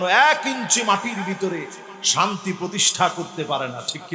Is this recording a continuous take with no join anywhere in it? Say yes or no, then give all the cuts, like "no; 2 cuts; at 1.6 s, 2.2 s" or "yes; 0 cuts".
yes; 0 cuts